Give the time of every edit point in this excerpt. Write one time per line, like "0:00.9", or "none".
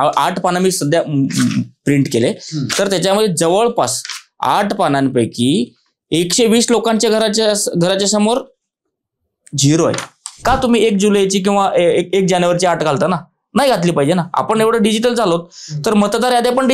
0:10.4